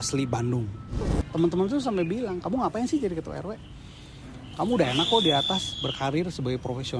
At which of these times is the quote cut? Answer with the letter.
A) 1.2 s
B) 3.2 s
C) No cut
A